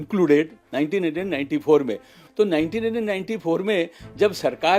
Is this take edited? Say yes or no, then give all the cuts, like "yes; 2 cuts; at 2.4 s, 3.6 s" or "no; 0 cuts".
yes; 1 cut; at 2.2 s